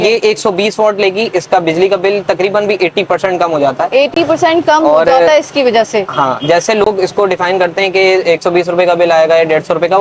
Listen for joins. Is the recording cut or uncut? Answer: uncut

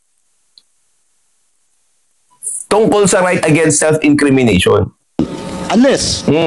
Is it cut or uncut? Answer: cut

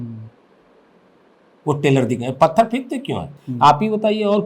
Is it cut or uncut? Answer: uncut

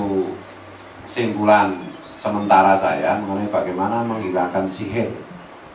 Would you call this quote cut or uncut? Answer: uncut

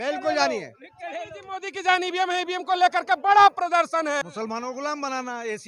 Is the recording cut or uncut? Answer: cut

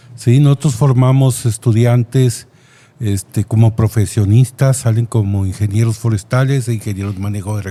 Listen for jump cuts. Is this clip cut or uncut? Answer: uncut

